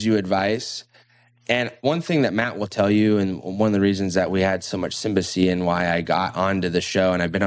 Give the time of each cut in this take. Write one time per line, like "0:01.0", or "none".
0:01.8